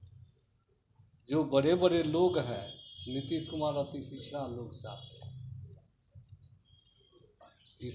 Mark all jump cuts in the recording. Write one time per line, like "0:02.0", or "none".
none

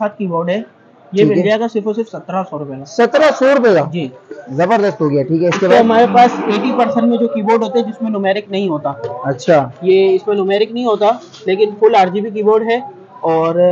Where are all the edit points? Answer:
none

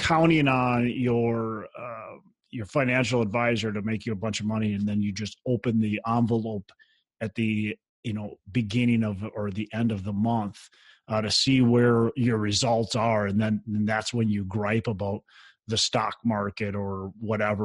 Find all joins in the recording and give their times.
0:07.9

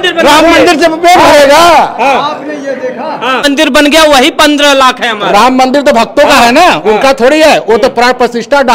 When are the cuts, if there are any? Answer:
0:03.4

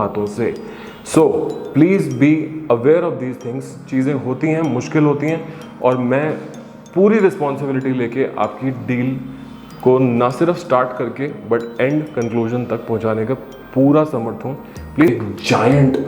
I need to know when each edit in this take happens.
0:15.1

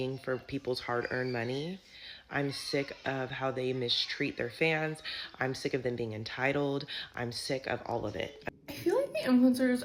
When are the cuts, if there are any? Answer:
0:08.5

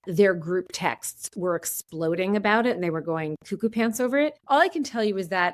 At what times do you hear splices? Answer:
0:04.4

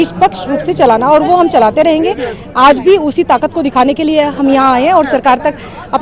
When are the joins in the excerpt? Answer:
none

